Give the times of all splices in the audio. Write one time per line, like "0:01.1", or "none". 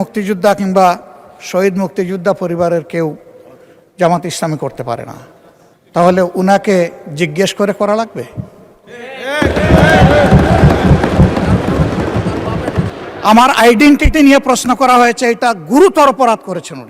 0:12.9

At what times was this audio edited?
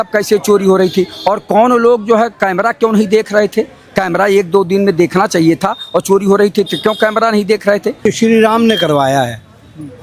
0:08.1

